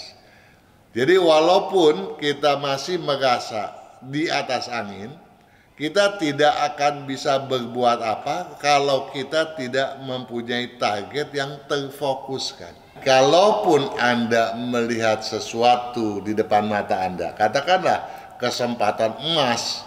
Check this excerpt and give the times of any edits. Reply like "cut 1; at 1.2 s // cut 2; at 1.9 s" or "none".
cut 1; at 12.9 s